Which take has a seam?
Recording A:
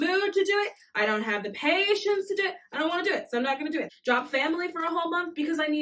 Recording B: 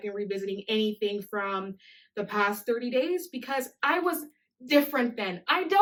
A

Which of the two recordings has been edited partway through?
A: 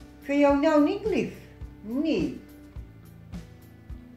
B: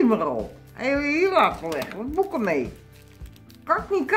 A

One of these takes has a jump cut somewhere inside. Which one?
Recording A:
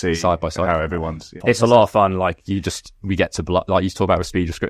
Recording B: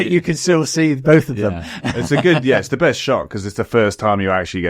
A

